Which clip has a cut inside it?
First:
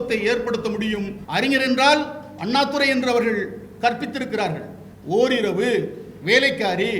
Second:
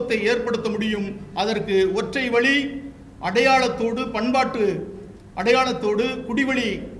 first; 1 cut; at 1.2 s

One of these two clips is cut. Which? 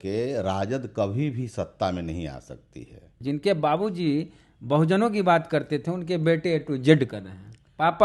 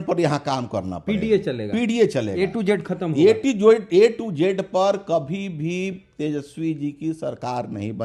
first; 1 cut; at 3.1 s

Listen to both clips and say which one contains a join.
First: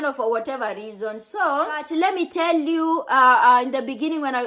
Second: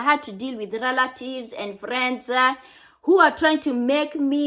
first; 1 cut; at 1.8 s

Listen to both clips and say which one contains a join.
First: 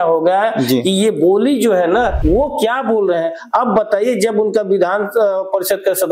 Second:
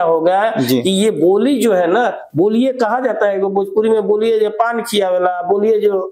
first; 1 cut; at 2.2 s

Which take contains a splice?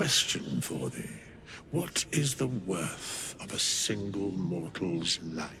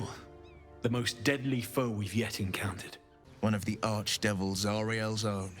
second; 1 cut; at 3.4 s

